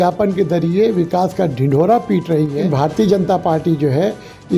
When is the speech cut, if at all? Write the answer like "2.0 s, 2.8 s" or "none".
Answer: 2.6 s